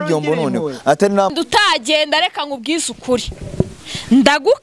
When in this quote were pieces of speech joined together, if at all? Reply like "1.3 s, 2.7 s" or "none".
1.3 s